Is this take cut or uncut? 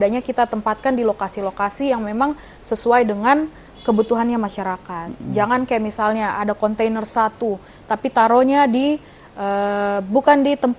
uncut